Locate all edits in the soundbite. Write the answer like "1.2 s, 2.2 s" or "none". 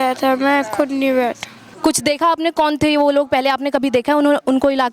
1.6 s